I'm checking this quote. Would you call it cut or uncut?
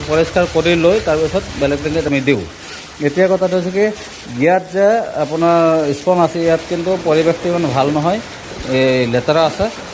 uncut